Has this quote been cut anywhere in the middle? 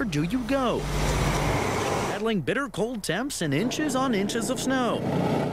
yes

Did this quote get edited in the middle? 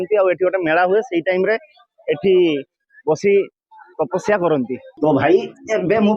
yes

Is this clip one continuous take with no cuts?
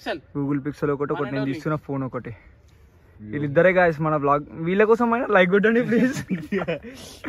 yes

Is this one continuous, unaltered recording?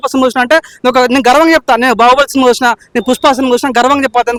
yes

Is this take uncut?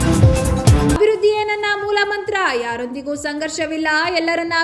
no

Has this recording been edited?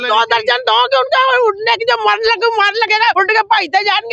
yes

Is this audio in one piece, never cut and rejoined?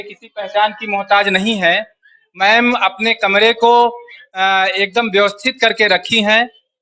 yes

